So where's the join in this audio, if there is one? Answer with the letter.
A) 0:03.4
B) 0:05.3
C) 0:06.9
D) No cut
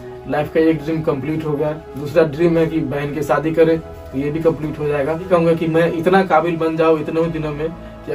B